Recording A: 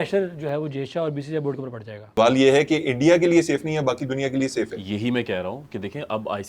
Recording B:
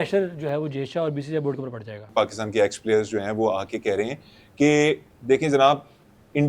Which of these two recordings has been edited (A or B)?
B